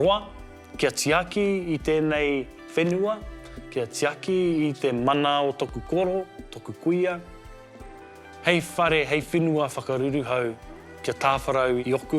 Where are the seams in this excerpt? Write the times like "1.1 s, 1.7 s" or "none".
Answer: none